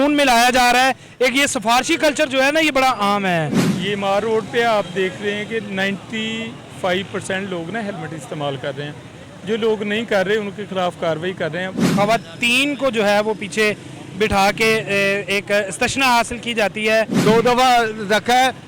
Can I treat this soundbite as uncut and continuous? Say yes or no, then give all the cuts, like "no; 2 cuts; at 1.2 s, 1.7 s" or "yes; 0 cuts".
no; 3 cuts; at 3.7 s, 11.9 s, 17.1 s